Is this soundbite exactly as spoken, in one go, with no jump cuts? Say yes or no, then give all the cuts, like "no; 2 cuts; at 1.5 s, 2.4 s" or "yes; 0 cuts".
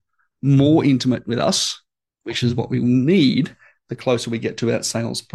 yes; 0 cuts